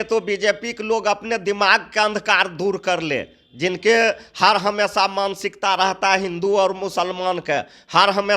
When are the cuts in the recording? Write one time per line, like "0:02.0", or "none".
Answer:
none

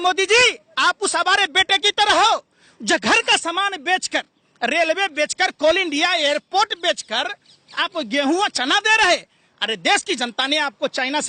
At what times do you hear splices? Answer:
none

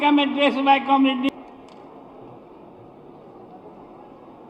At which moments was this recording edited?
0:01.3

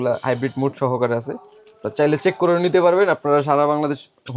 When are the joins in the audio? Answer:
none

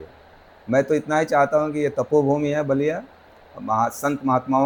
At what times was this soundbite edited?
none

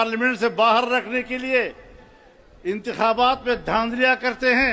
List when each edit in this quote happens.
none

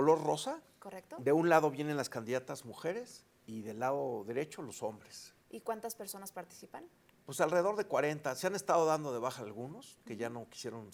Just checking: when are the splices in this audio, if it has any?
none

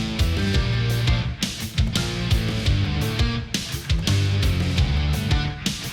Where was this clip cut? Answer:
none

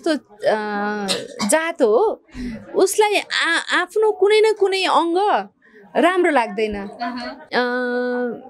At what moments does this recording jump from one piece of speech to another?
0:07.3

